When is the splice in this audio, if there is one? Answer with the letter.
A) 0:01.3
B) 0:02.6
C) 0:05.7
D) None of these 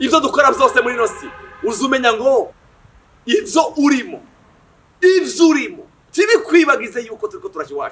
B